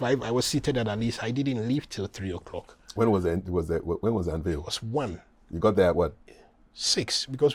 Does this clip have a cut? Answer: no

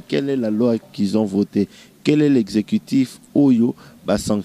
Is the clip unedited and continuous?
yes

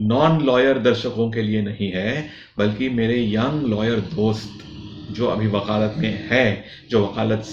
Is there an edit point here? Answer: no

